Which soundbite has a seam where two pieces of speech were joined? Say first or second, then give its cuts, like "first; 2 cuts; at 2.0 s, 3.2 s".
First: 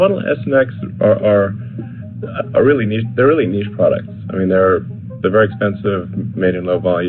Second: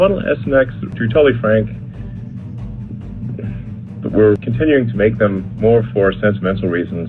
second; 2 cuts; at 0.9 s, 4.5 s